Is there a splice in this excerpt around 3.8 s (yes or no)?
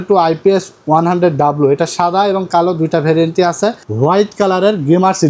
yes